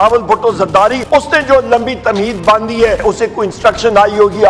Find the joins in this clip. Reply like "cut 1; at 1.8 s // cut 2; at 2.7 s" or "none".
cut 1; at 1.1 s // cut 2; at 3.0 s